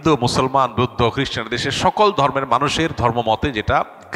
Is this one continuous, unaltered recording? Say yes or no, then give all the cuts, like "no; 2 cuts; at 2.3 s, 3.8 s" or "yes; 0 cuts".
yes; 0 cuts